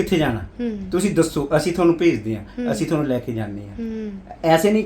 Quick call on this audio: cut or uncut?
uncut